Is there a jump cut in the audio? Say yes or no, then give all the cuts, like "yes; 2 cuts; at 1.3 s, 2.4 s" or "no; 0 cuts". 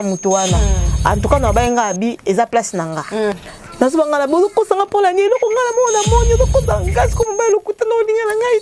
yes; 1 cut; at 3.3 s